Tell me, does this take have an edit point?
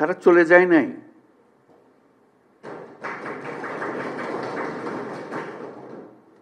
no; 0 cuts

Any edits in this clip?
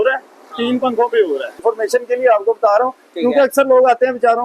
yes; 1 cut; at 1.6 s

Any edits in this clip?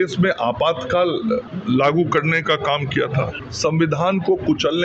yes; 2 cuts; at 1.5 s, 3.4 s

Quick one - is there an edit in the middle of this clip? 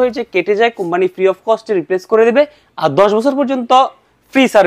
no; 0 cuts

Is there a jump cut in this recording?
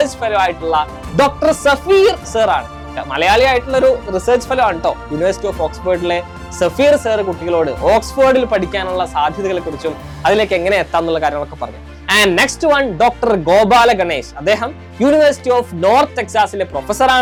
no; 0 cuts

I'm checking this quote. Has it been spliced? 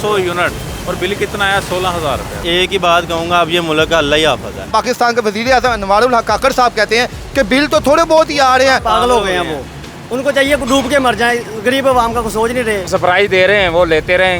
yes; 4 cuts; at 2.4 s, 4.7 s, 8.8 s, 12.9 s

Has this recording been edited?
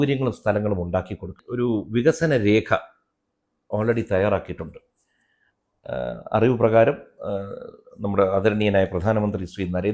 yes; 1 cut; at 1.4 s

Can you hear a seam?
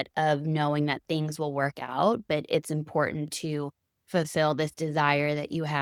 no; 0 cuts

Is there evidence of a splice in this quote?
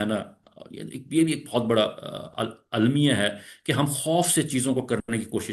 no; 0 cuts

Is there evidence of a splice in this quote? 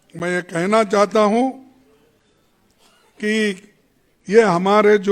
no; 0 cuts

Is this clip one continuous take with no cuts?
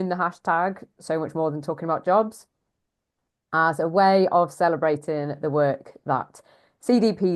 yes; 0 cuts

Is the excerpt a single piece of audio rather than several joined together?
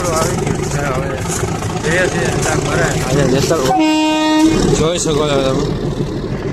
yes; 0 cuts

